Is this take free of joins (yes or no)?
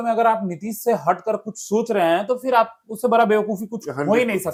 yes